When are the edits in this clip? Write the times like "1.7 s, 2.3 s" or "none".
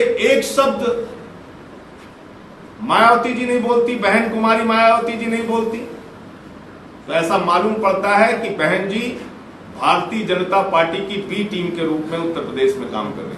none